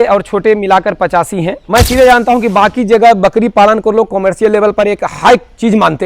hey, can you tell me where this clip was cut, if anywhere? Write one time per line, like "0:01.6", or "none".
0:01.7

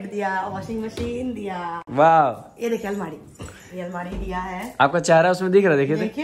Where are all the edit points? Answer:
none

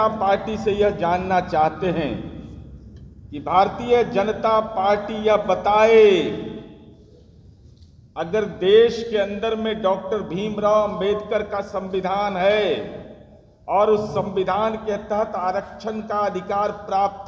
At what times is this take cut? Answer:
none

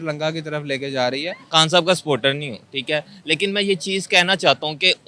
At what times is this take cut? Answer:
0:01.4

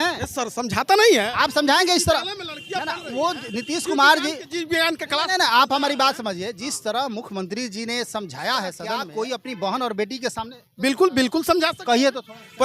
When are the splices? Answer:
0:09.0

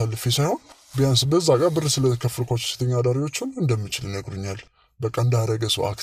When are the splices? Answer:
none

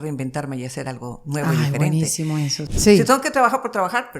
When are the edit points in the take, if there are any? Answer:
0:02.6

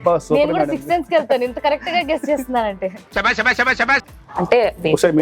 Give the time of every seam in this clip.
0:04.1

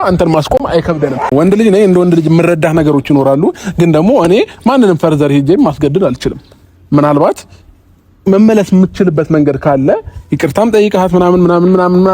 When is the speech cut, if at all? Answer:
0:01.3

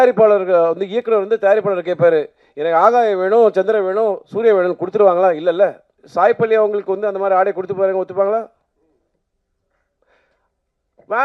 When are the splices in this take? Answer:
0:06.0

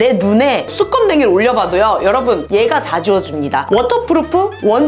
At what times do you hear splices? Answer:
none

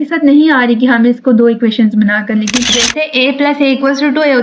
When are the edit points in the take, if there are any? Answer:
0:02.5

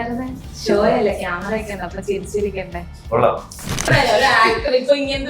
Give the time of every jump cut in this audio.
0:03.8

